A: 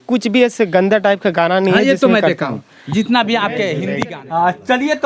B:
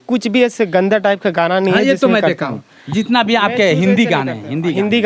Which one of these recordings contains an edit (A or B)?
A